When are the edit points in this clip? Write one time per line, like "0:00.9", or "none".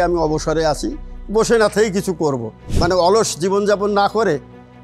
0:02.7